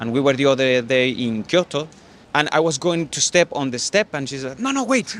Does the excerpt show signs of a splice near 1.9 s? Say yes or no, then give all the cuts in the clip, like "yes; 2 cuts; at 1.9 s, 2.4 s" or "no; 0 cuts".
no; 0 cuts